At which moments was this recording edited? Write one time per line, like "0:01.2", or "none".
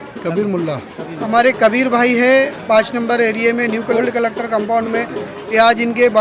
0:01.2
0:04.0